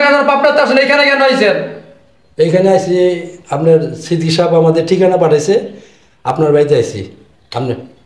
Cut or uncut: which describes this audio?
uncut